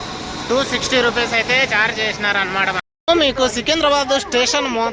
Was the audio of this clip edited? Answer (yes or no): yes